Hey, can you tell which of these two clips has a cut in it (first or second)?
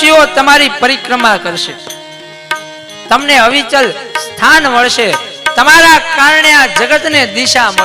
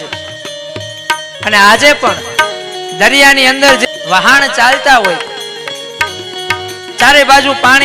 second